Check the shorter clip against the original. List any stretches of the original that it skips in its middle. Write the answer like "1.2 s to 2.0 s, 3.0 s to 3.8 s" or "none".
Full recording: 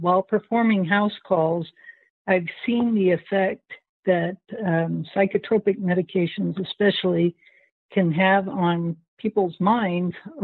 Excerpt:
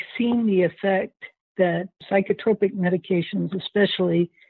4.5 s to 5.0 s